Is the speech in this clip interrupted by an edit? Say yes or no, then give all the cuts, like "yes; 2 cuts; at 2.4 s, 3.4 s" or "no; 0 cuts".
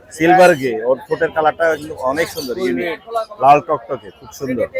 no; 0 cuts